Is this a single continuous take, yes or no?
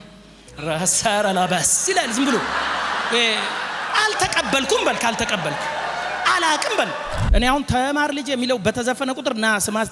no